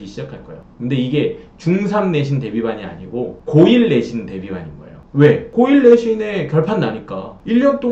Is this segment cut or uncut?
uncut